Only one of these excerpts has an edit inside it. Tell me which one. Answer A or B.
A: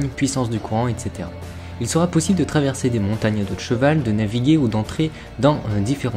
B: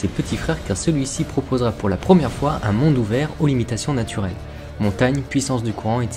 B